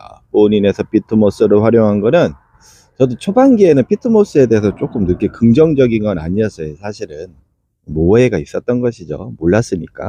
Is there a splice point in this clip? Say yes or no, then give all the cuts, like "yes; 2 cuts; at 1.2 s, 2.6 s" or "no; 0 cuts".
no; 0 cuts